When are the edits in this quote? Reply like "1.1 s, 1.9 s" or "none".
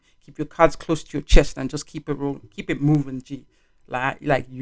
none